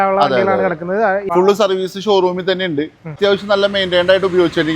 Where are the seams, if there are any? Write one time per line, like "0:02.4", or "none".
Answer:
0:01.2
0:03.2